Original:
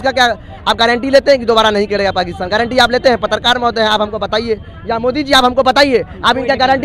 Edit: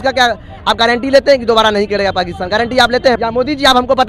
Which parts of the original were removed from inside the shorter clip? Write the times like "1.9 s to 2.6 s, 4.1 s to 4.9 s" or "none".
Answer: 3.2 s to 4.9 s

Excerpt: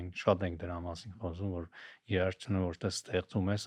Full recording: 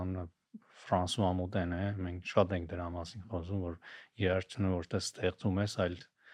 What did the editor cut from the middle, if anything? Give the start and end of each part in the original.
none

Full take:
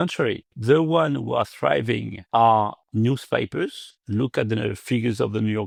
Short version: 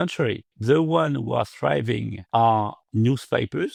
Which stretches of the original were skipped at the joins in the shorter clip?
none

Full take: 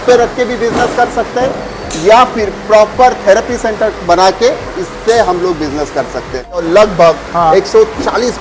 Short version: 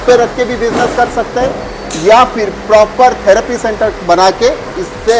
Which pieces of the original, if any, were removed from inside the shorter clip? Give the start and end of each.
none

